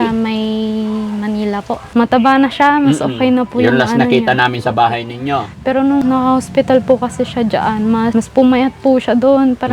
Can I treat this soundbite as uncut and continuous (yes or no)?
no